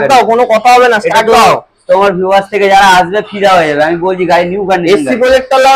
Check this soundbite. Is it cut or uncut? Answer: uncut